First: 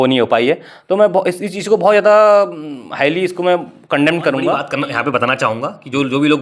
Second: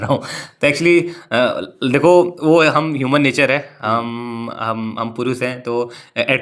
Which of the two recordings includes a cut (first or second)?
first